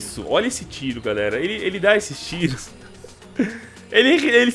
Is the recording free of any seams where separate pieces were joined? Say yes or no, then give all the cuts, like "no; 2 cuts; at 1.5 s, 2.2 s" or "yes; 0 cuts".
yes; 0 cuts